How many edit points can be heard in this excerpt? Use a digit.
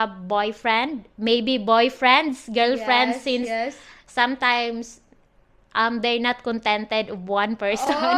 0